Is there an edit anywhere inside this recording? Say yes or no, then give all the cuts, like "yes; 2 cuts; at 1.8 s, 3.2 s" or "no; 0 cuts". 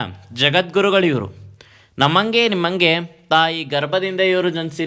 no; 0 cuts